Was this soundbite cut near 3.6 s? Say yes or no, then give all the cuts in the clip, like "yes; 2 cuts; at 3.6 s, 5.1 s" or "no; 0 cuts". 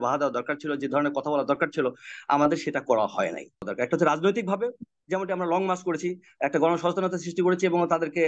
yes; 1 cut; at 3.6 s